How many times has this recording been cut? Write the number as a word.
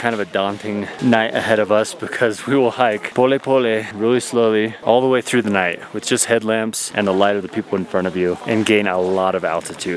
zero